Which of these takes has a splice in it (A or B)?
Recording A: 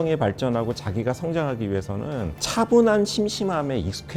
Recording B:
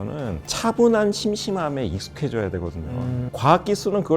B